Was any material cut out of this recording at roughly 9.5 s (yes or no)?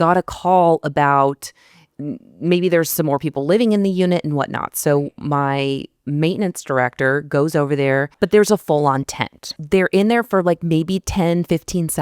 yes